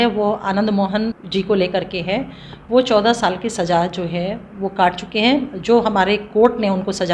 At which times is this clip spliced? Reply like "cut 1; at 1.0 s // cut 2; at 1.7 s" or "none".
cut 1; at 1.1 s